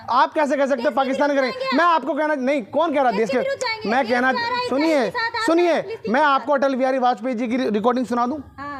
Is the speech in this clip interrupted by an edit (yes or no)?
no